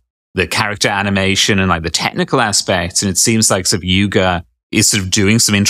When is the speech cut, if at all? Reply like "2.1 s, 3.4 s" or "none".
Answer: 4.5 s